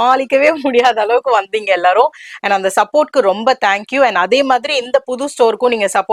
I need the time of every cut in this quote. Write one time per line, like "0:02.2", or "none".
none